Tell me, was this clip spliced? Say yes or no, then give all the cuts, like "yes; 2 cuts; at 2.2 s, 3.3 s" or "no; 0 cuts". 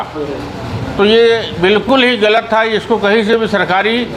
no; 0 cuts